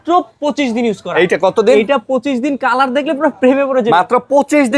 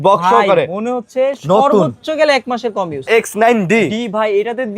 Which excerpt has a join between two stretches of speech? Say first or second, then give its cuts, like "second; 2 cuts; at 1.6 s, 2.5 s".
second; 1 cut; at 3.1 s